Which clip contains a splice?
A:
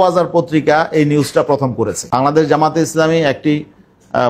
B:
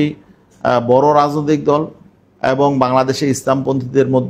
A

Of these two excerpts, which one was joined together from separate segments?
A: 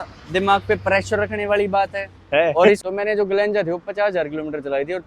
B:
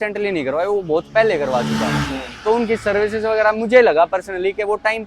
A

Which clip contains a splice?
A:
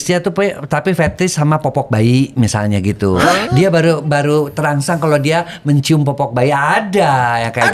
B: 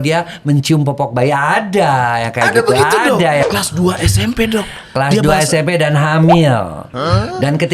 B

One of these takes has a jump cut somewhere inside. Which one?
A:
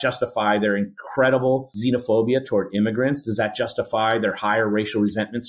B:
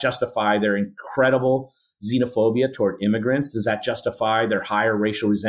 A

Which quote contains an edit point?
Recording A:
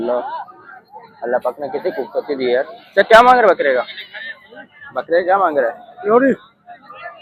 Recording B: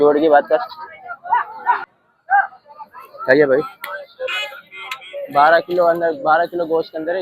B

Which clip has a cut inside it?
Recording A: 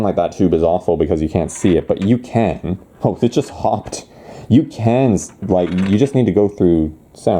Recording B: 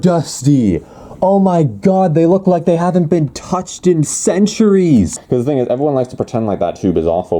B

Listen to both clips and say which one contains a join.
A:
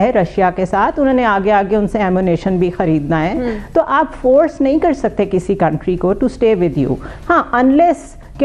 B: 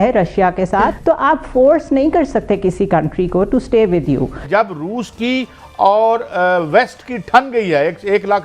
B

